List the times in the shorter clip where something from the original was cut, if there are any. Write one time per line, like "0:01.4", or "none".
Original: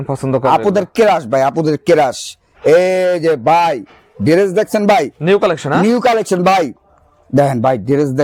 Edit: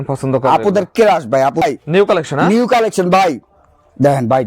0:01.6